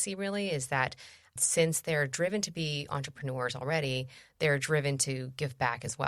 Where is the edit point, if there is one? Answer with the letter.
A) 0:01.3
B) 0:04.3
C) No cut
C